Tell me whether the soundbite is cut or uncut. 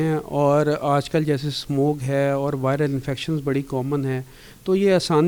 uncut